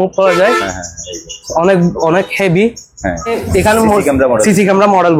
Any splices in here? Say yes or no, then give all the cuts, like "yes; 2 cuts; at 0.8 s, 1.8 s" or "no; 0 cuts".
yes; 1 cut; at 3.4 s